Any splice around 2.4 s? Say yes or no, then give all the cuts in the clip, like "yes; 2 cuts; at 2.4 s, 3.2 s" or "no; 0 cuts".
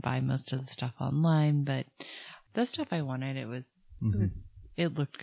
yes; 1 cut; at 2.4 s